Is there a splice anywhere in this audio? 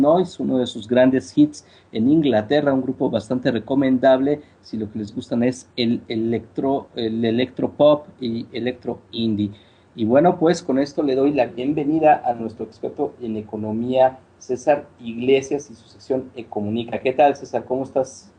no; 0 cuts

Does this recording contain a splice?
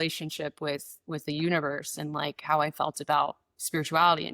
no; 0 cuts

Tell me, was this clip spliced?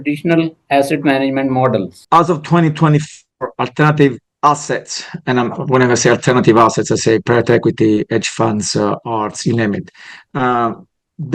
yes; 1 cut; at 2.0 s

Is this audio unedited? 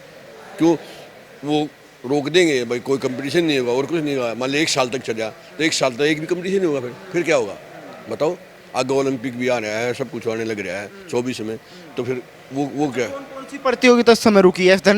yes; 0 cuts

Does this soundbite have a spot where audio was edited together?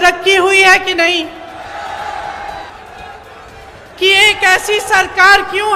yes; 1 cut; at 2.7 s

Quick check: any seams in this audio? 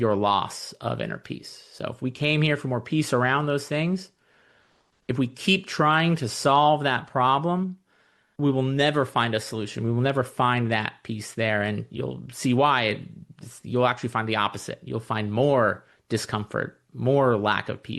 no; 0 cuts

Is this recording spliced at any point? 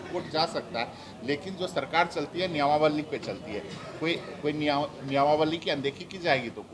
no; 0 cuts

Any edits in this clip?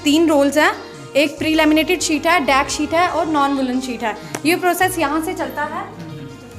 yes; 1 cut; at 1.4 s

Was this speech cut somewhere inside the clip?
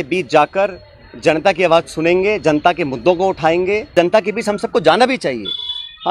yes; 1 cut; at 3.9 s

